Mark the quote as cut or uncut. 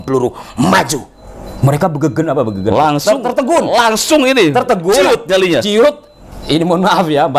uncut